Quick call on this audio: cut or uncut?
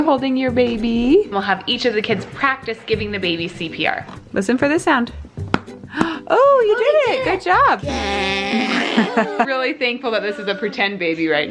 cut